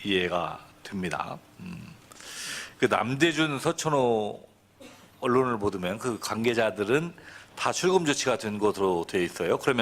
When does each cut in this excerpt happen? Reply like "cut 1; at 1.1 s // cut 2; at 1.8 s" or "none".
cut 1; at 6.5 s